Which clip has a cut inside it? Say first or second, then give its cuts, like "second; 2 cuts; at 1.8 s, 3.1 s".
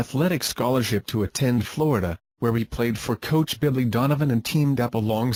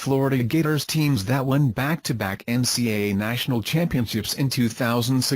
second; 1 cut; at 4.0 s